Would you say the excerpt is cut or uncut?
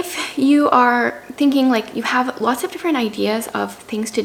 uncut